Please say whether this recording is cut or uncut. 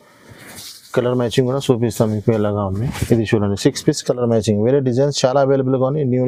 uncut